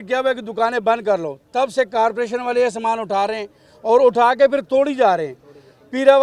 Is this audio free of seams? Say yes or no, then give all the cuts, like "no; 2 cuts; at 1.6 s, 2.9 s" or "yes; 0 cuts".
yes; 0 cuts